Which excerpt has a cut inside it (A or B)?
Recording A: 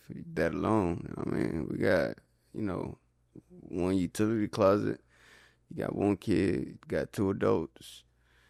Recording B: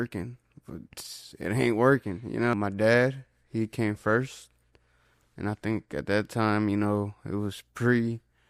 B